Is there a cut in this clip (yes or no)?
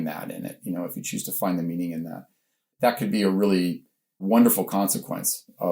yes